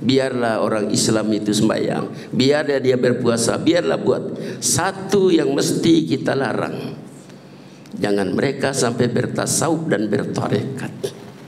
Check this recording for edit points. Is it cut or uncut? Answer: uncut